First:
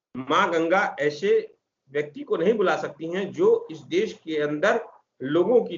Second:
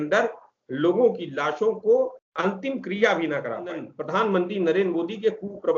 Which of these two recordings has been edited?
second; 2 cuts; at 2.2 s, 4.0 s

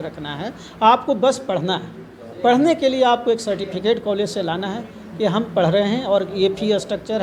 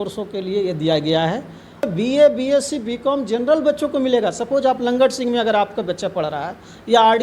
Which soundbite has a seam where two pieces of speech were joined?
second; 1 cut; at 1.9 s

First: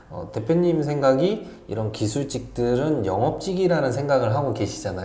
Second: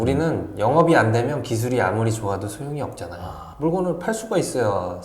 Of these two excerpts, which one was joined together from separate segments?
second; 1 cut; at 3.4 s

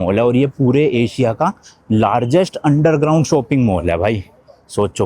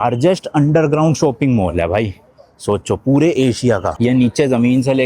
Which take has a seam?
second; 1 cut; at 3.9 s

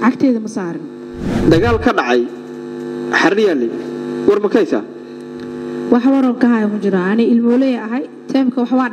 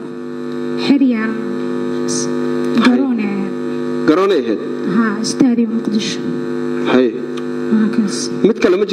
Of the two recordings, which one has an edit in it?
first; 1 cut; at 1.4 s

